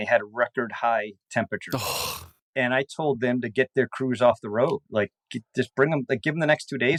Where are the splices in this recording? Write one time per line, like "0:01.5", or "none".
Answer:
none